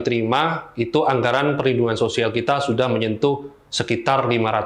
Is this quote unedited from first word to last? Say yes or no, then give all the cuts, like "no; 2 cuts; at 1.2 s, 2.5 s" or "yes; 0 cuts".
yes; 0 cuts